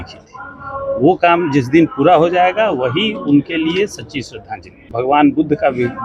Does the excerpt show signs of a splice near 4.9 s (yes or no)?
yes